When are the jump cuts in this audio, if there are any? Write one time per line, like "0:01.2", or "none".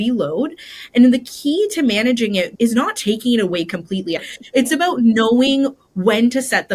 0:02.5
0:04.3

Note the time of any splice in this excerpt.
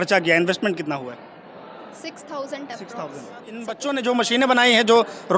0:03.8

